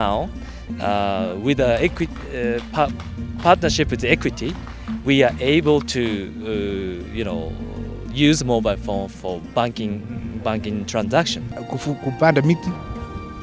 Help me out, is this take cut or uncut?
cut